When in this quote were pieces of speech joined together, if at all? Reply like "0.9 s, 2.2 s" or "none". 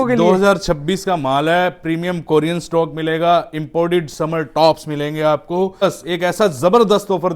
5.8 s